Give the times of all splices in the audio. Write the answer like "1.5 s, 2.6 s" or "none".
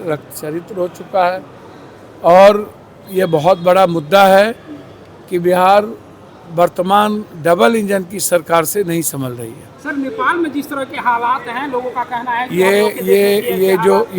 none